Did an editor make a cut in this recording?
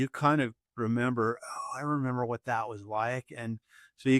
no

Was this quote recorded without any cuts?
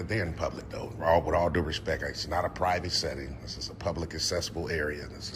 yes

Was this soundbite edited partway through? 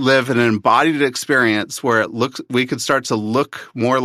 no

